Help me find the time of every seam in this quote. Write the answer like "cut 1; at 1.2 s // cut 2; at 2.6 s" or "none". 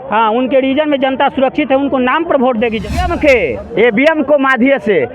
cut 1; at 3.0 s